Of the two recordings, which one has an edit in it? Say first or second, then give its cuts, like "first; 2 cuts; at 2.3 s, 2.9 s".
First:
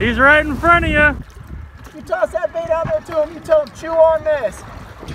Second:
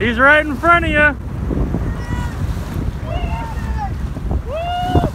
first; 1 cut; at 1.3 s